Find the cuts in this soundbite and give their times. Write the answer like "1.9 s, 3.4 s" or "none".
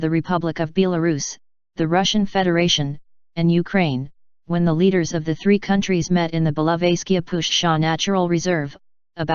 none